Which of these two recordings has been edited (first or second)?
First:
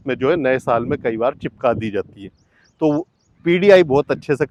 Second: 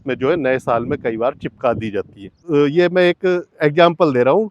second